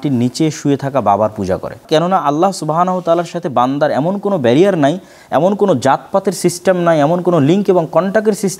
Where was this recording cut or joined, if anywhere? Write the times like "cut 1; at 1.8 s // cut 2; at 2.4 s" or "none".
cut 1; at 1.8 s